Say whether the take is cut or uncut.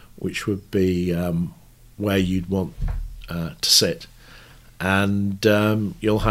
uncut